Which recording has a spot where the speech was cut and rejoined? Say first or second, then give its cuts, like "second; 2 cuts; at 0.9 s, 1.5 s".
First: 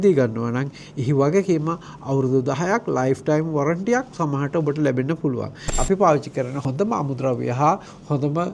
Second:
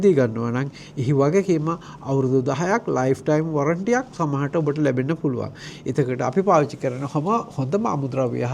first; 2 cuts; at 5.8 s, 6.6 s